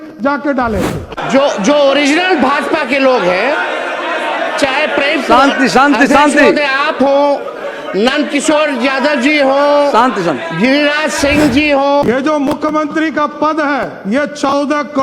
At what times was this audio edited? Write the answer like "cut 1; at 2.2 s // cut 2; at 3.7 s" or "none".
cut 1; at 1.1 s // cut 2; at 12.0 s